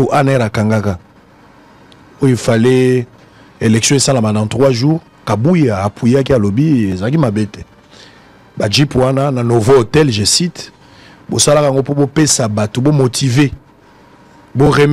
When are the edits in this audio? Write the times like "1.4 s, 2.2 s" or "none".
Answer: none